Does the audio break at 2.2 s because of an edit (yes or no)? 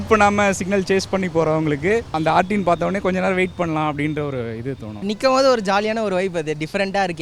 yes